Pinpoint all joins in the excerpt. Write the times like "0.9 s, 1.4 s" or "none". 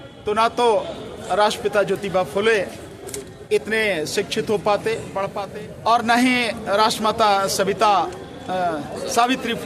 5.4 s